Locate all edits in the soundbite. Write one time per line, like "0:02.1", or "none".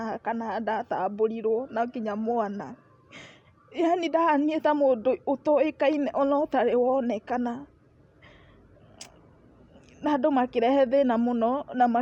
none